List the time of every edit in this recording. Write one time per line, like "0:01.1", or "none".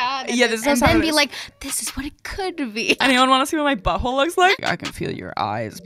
0:03.0
0:04.6